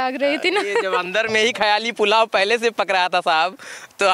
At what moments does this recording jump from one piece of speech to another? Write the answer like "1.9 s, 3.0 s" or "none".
none